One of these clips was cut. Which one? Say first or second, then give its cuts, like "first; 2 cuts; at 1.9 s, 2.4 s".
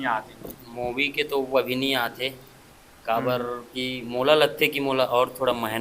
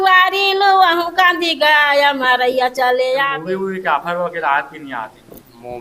second; 1 cut; at 3.3 s